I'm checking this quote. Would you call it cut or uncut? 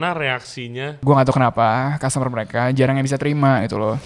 cut